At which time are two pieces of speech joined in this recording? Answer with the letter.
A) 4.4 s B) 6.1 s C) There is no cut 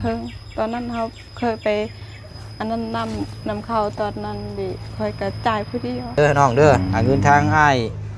B